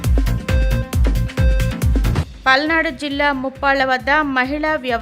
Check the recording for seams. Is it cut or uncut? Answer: cut